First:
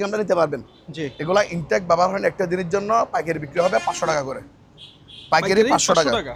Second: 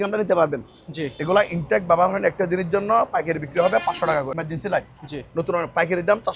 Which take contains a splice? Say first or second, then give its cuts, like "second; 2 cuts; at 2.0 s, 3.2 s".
second; 1 cut; at 4.4 s